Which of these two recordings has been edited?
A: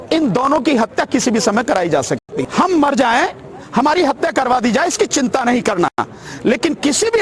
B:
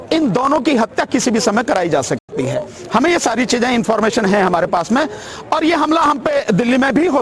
A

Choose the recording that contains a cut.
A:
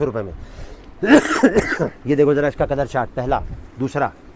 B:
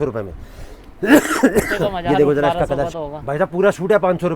B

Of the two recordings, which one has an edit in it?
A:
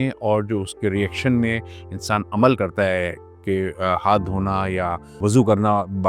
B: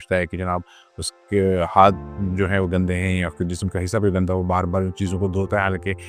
A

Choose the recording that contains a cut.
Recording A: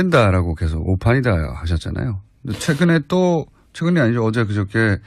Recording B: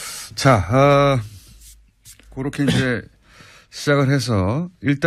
B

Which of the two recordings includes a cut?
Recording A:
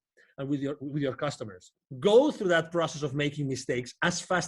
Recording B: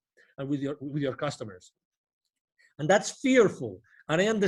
A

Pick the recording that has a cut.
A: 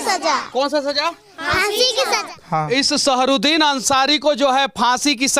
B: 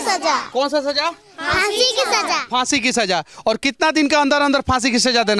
A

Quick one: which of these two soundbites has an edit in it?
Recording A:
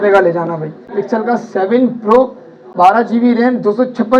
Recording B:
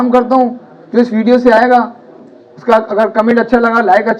A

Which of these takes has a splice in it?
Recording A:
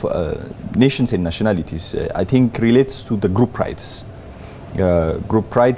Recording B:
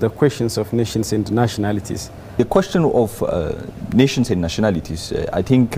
B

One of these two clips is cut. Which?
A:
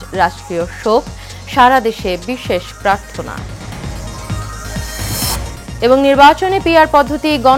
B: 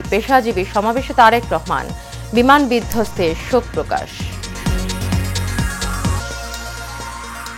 B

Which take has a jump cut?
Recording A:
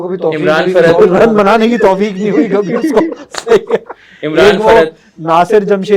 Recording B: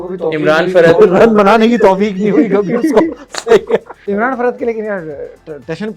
B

